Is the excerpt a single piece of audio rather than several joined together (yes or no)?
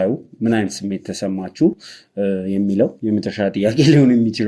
yes